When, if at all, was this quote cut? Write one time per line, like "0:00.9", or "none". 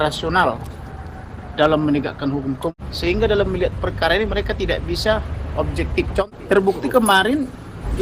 0:02.7
0:06.2